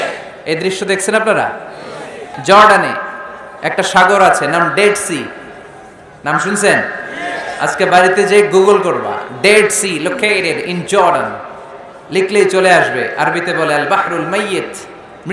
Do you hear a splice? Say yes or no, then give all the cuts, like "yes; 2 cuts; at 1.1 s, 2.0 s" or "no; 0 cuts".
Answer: yes; 1 cut; at 2.3 s